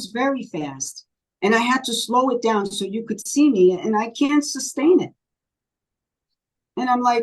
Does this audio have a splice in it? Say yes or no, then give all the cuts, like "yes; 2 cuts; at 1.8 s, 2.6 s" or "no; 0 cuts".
no; 0 cuts